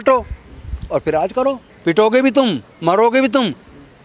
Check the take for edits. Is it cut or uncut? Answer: cut